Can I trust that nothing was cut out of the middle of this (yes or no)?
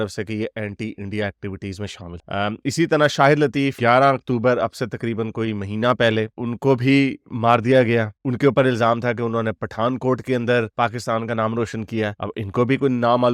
yes